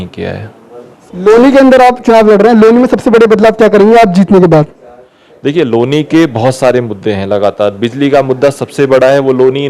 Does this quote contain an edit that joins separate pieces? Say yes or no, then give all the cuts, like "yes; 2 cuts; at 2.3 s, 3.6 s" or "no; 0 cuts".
yes; 1 cut; at 0.9 s